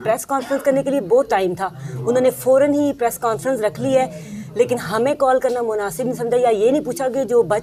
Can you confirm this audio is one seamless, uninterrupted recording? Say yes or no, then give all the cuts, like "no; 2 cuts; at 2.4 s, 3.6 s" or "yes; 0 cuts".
yes; 0 cuts